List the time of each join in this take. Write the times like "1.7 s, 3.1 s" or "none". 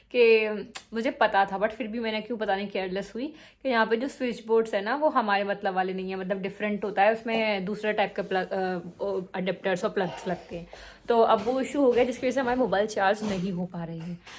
none